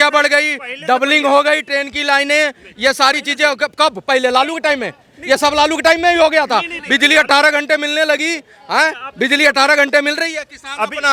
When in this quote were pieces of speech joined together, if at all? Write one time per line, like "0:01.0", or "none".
none